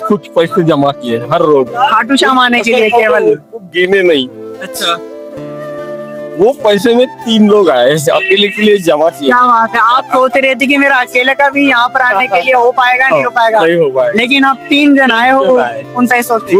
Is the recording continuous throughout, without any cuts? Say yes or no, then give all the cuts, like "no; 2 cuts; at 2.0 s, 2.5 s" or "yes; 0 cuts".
yes; 0 cuts